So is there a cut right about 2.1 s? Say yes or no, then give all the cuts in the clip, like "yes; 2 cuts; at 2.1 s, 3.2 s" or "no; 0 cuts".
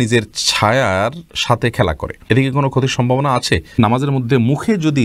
yes; 2 cuts; at 2.1 s, 3.8 s